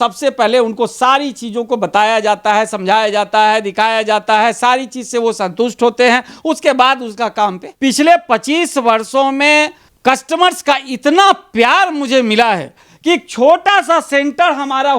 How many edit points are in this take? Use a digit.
1